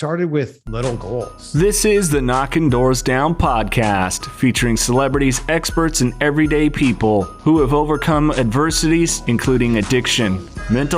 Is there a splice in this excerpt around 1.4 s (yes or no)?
yes